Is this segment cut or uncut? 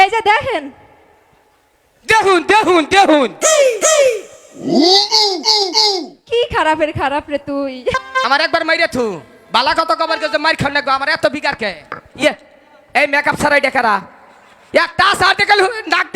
cut